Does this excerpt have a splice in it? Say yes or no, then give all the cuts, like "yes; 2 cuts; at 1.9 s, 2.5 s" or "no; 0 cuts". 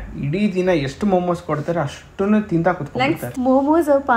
yes; 1 cut; at 3.2 s